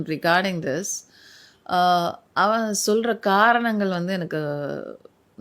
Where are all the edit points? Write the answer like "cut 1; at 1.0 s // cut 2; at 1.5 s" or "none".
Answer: none